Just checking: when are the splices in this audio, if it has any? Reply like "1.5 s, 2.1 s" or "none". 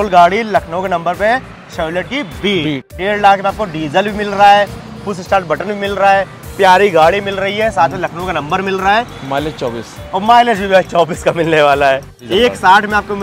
3.0 s, 12.1 s